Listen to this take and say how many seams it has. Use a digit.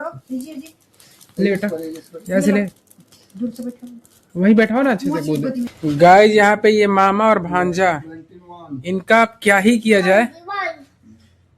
1